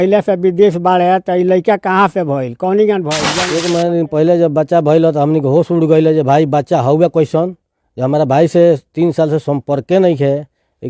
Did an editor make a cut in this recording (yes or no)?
yes